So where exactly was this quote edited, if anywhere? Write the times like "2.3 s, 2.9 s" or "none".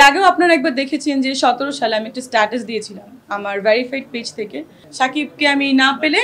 4.8 s